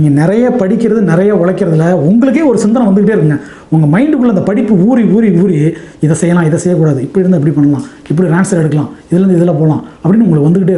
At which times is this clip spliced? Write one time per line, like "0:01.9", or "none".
none